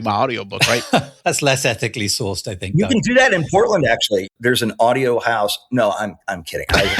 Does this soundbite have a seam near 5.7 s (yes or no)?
no